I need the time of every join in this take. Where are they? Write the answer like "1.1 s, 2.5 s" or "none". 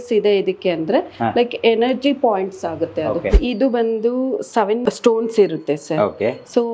3.3 s, 4.8 s